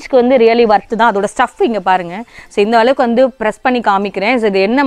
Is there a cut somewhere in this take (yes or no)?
no